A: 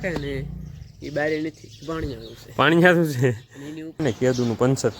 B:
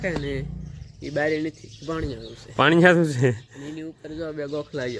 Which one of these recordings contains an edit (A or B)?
A